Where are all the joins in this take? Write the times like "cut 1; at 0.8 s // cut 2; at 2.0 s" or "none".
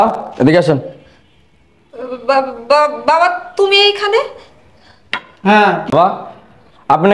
cut 1; at 5.9 s